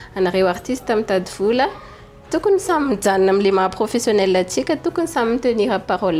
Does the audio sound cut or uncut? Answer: uncut